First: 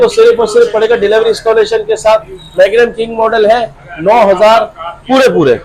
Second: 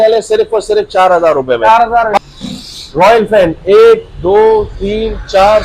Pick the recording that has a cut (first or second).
second